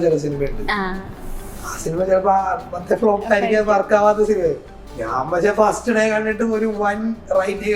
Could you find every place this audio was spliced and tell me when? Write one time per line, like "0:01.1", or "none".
none